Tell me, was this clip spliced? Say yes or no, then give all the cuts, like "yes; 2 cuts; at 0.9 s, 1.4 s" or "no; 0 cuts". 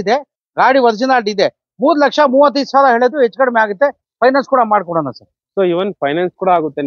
no; 0 cuts